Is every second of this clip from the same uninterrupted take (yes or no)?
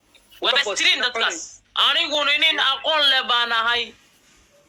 yes